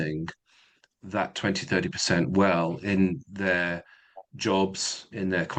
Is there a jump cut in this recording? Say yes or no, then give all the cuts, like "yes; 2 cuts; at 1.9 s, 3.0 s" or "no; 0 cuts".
no; 0 cuts